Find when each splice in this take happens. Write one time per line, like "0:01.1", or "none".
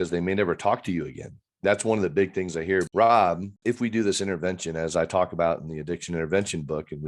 0:02.9
0:03.5

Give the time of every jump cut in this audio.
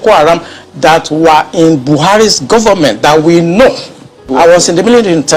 0:04.2

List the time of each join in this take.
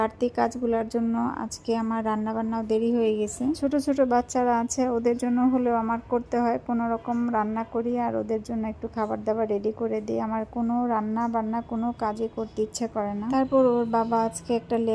none

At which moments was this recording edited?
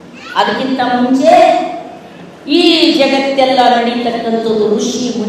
none

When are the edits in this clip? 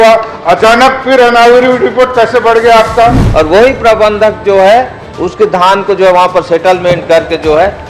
0:03.2

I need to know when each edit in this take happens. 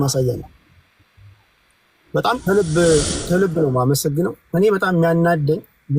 0:02.4

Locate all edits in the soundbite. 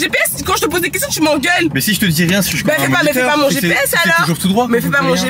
none

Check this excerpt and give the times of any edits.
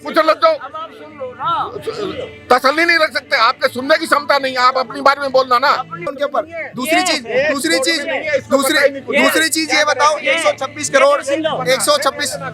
0:06.1

